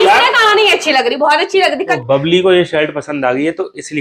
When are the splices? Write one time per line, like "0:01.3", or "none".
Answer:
0:01.9